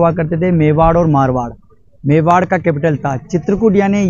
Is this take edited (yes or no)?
no